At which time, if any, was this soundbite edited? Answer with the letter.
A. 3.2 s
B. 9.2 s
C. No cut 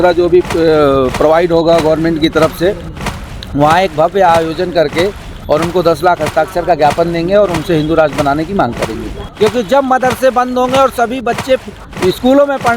B